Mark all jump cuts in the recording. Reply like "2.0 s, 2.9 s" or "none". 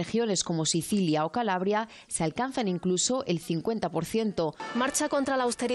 4.6 s